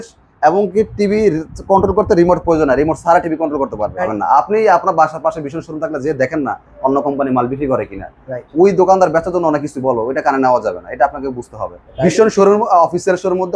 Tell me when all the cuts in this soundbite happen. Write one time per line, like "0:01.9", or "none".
0:04.1
0:11.9